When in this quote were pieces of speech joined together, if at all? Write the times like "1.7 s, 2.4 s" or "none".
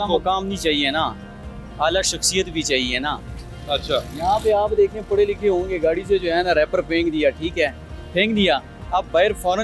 none